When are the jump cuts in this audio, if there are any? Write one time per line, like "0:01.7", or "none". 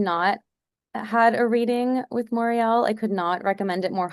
none